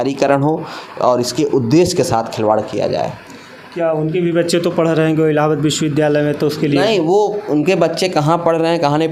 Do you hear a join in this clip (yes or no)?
no